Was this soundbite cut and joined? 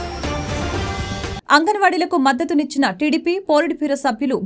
yes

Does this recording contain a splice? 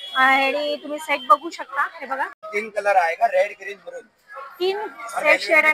yes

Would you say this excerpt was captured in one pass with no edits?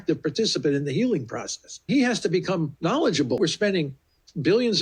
no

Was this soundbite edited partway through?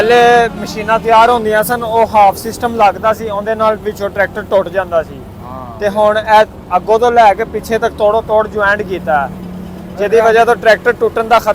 no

